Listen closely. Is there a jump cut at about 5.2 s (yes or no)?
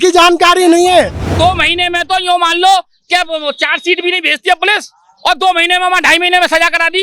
no